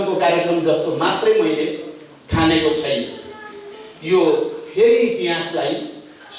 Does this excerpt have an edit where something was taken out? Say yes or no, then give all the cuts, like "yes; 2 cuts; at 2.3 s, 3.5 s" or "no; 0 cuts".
no; 0 cuts